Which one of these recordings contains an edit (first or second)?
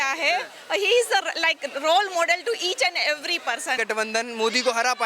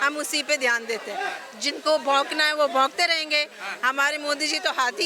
first